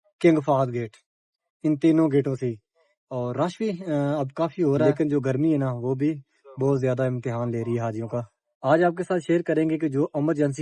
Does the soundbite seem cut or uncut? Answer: cut